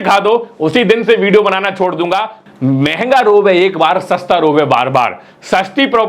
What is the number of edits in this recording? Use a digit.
1